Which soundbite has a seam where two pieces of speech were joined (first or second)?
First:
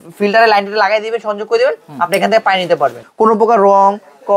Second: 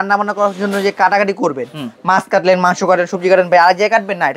first